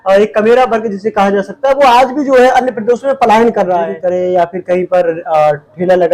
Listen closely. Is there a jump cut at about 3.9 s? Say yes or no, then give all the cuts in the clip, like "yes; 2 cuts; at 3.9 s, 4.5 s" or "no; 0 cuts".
yes; 1 cut; at 3.9 s